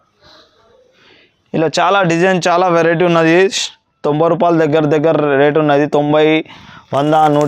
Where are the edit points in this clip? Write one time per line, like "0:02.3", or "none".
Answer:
none